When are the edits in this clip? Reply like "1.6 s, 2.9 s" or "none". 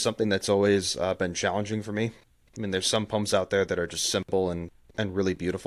none